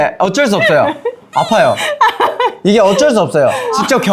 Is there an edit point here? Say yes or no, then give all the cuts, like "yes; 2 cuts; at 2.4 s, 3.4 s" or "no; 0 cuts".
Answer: no; 0 cuts